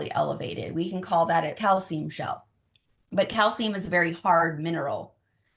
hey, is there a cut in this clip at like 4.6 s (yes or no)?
no